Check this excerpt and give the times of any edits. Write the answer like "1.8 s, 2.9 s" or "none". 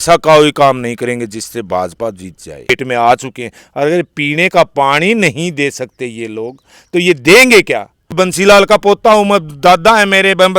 2.7 s, 8.1 s